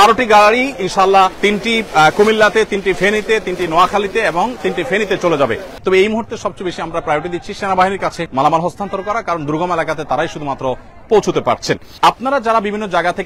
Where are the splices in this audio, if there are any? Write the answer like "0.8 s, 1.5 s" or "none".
1.3 s, 5.7 s, 8.2 s, 11.9 s